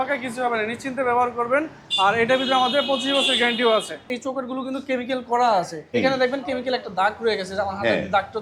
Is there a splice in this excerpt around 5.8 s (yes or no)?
yes